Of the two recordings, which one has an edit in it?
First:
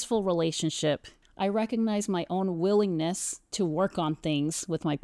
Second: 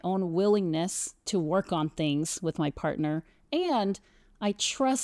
first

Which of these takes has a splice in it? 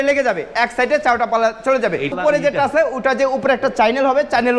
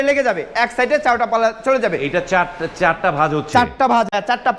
first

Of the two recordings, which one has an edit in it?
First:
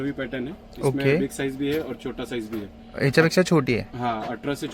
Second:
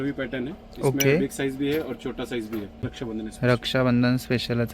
second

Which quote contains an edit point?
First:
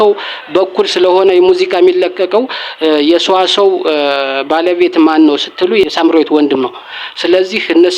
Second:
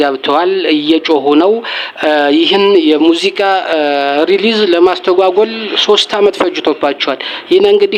first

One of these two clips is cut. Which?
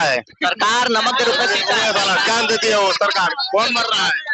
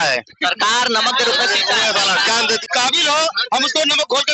second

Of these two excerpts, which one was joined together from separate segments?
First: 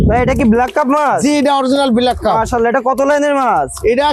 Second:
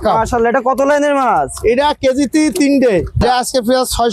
second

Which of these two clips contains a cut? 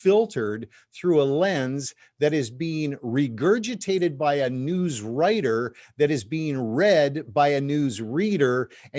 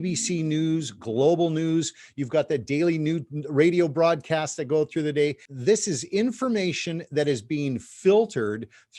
second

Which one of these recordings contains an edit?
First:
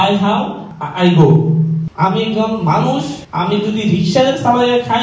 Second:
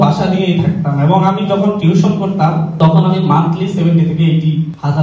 first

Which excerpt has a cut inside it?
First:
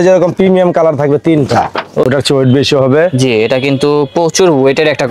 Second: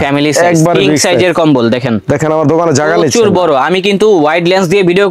first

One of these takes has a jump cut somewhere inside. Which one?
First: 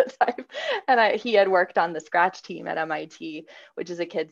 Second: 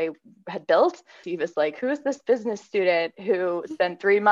second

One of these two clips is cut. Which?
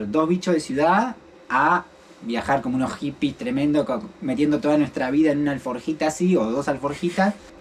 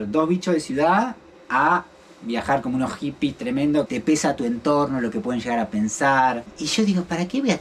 second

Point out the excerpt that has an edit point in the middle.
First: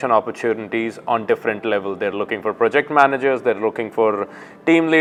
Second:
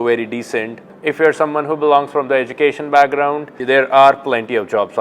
second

